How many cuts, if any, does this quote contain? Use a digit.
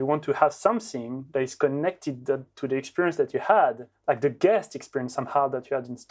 1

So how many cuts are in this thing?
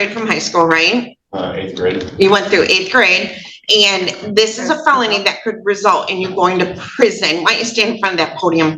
0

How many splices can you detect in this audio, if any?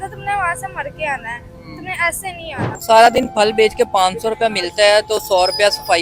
1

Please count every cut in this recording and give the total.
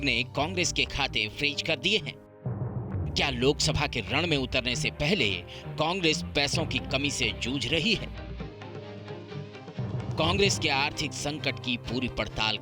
0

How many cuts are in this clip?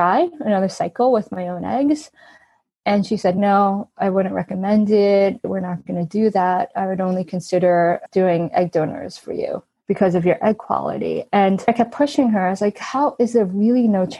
3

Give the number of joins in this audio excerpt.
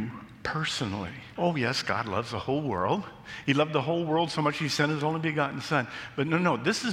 1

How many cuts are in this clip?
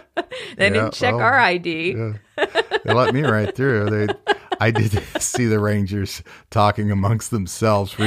0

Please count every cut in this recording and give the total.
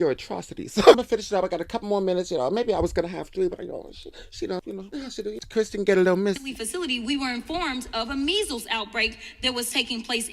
2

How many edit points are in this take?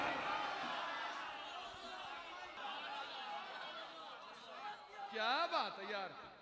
1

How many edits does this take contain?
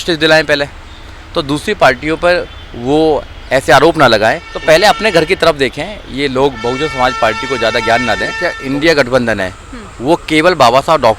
2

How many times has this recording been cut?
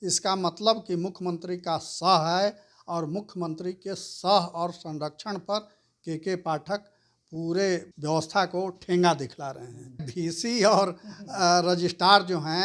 2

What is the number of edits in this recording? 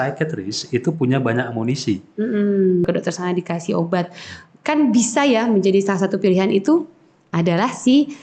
1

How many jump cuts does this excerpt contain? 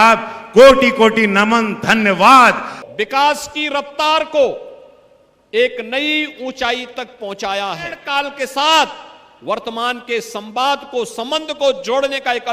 2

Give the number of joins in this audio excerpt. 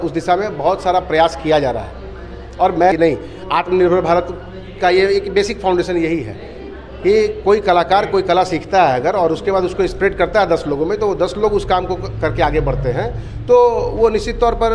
1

